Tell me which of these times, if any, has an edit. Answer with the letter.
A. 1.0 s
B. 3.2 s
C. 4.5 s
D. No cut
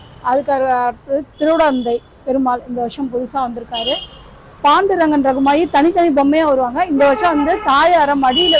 D